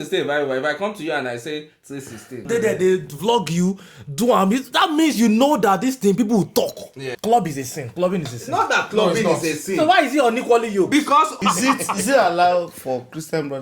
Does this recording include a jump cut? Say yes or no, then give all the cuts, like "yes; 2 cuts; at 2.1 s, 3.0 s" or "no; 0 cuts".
yes; 3 cuts; at 2.4 s, 7.1 s, 11.3 s